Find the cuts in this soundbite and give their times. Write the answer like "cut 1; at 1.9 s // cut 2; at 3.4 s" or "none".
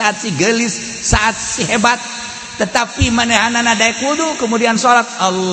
none